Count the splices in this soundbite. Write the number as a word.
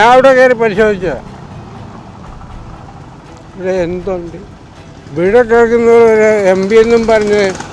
zero